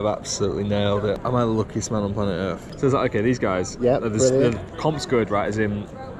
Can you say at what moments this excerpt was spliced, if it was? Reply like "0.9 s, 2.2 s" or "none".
1.2 s, 2.7 s